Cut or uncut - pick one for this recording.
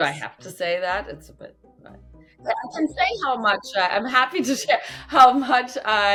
uncut